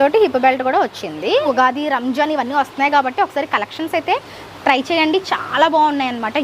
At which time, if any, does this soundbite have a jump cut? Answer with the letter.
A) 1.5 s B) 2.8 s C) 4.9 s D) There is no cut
A